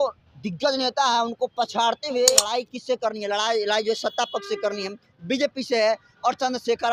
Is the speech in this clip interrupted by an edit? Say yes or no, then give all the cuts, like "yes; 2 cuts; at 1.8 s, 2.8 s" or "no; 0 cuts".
yes; 1 cut; at 2.5 s